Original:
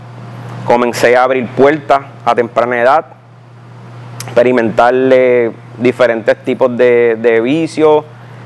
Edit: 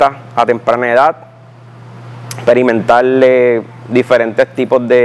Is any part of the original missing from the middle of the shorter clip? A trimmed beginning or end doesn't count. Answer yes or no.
no